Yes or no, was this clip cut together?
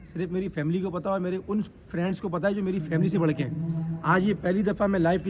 no